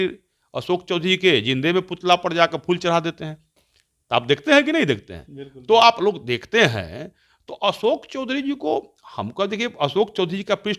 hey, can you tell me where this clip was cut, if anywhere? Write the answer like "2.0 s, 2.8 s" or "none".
none